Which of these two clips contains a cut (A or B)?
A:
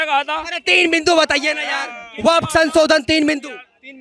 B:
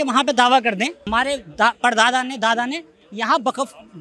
B